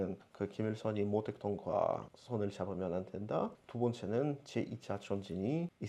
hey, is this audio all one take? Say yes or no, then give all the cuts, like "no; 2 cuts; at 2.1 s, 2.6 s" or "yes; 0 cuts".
yes; 0 cuts